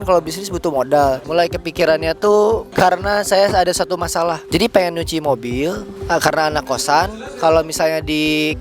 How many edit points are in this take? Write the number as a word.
four